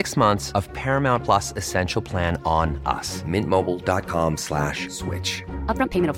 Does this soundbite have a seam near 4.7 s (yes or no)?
no